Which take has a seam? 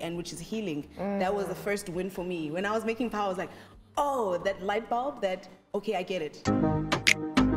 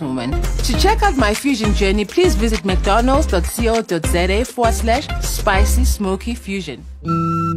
first; 1 cut; at 6.4 s

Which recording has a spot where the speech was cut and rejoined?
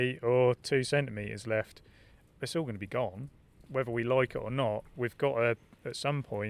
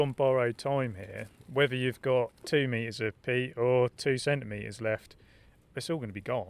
first; 1 cut; at 4.9 s

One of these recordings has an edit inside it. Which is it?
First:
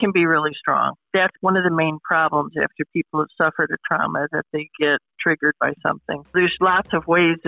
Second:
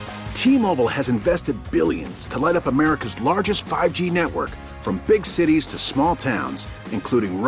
first; 3 cuts; at 1.3 s, 5.1 s, 6.3 s

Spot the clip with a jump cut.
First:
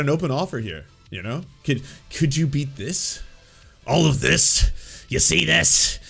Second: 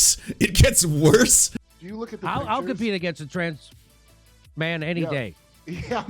second; 1 cut; at 1.4 s

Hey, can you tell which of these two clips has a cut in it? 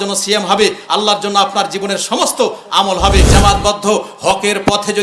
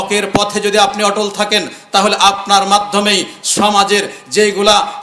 first; 1 cut; at 3.3 s

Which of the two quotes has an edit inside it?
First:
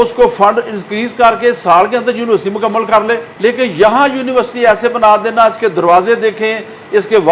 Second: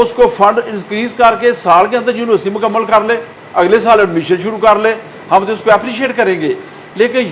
first; 1 cut; at 3.3 s

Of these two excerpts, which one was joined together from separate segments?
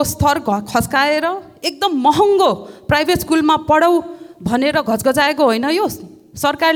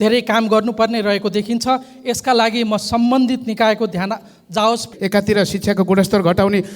second; 1 cut; at 4.9 s

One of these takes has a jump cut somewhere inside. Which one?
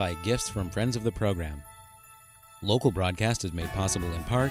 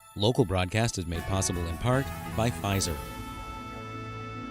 second; 1 cut; at 3.0 s

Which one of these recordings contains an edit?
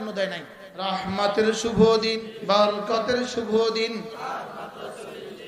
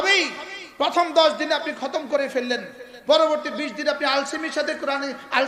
first; 2 cuts; at 0.9 s, 2.3 s

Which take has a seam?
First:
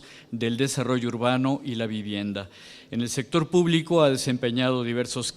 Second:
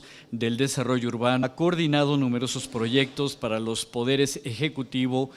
first; 1 cut; at 1.4 s

